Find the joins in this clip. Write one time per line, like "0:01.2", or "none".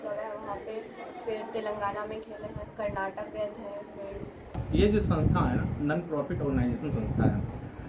0:04.6